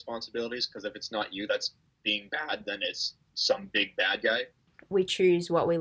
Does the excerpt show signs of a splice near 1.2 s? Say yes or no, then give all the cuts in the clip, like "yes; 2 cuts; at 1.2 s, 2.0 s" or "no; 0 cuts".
no; 1 cut; at 4.7 s